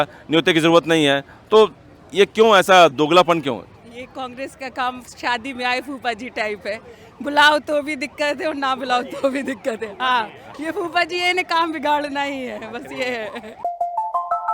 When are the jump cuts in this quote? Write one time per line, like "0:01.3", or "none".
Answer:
none